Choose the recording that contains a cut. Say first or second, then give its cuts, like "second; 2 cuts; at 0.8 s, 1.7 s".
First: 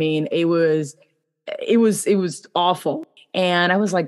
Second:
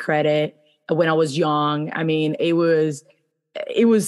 first; 1 cut; at 3.0 s